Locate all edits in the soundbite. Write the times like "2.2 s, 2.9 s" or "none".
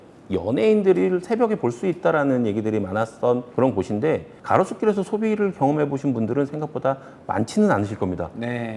4.3 s